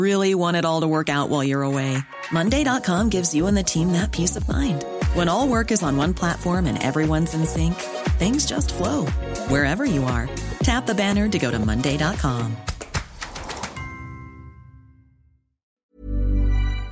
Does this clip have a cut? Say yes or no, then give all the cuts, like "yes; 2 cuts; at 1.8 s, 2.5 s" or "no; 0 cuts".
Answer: yes; 1 cut; at 15.7 s